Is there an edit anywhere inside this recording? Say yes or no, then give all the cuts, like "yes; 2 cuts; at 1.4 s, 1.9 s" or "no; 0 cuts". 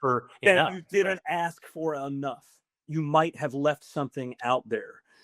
yes; 1 cut; at 2.8 s